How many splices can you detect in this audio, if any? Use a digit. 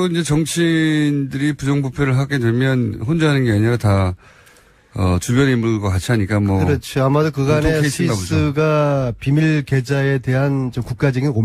1